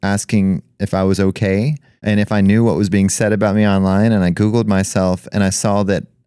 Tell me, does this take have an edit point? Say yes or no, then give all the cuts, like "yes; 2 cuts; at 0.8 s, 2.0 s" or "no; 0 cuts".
yes; 1 cut; at 1.9 s